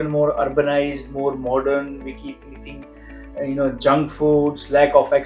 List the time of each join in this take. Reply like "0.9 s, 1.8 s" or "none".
none